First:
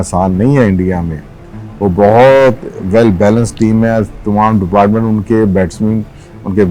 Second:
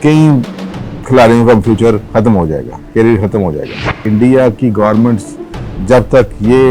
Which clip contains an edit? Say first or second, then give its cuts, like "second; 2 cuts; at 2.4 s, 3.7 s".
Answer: second; 1 cut; at 4.0 s